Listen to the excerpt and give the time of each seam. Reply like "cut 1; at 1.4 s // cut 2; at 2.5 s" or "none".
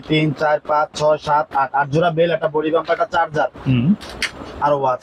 none